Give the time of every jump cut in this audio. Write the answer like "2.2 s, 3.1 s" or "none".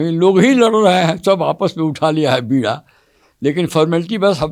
none